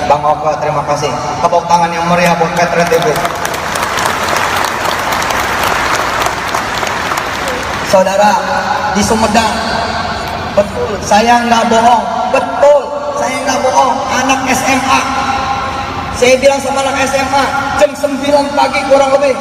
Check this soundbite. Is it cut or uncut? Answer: uncut